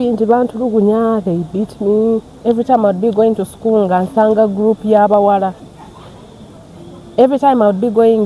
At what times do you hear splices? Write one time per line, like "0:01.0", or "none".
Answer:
0:02.3
0:05.6